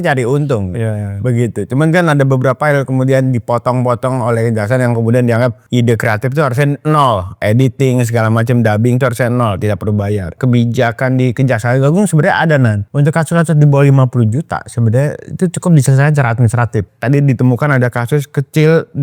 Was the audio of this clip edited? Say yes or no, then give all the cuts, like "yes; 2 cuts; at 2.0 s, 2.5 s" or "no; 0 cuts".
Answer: yes; 5 cuts; at 5.6 s, 7.4 s, 10.4 s, 12.8 s, 16.9 s